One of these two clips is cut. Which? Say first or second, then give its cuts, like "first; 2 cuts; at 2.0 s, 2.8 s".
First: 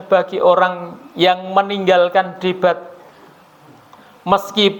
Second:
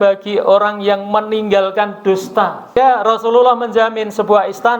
second; 1 cut; at 2.7 s